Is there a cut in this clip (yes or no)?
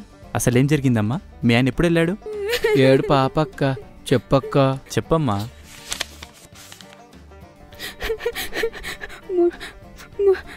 no